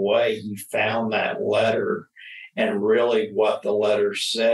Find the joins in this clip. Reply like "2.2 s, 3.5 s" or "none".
none

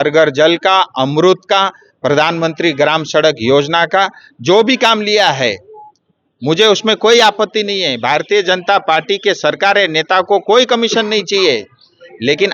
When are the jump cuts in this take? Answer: none

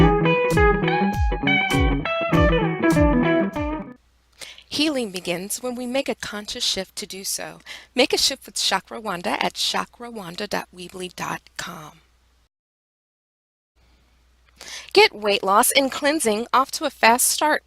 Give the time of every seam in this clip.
3.8 s

